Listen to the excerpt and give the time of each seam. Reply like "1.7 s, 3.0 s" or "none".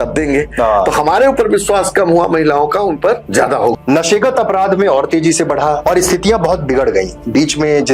3.4 s, 5.8 s